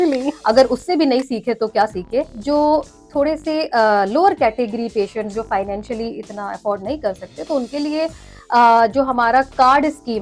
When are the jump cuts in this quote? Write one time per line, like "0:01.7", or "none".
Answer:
0:02.3